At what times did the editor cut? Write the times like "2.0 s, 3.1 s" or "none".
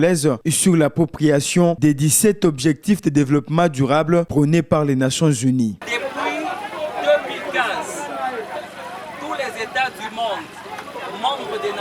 5.8 s